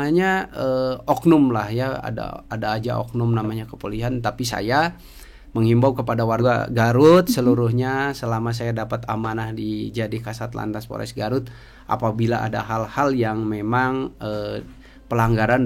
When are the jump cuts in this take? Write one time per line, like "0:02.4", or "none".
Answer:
0:06.4